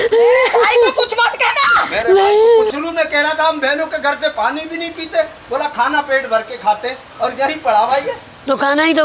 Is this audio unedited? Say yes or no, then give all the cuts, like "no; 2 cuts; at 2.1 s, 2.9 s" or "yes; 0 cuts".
no; 1 cut; at 2.7 s